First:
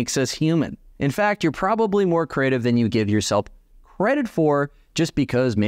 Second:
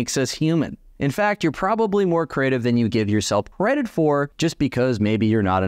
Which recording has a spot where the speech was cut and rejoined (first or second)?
second